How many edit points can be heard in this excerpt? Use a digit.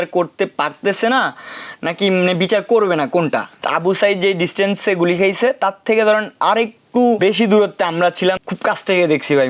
3